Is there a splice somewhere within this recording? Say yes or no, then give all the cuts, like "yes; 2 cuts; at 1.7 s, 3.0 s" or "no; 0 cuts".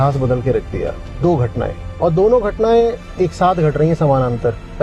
no; 0 cuts